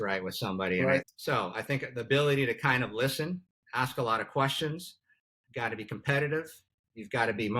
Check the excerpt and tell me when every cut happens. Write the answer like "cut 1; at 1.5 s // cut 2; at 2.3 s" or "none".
cut 1; at 1.0 s